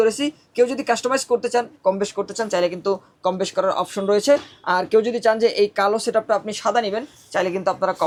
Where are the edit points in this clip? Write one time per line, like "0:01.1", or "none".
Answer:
none